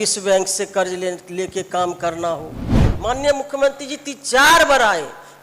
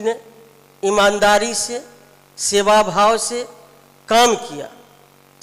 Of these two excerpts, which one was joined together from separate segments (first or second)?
first